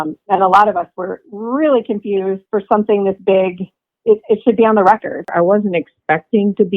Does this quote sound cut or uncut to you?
cut